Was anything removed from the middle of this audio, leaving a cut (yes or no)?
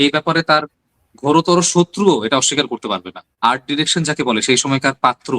yes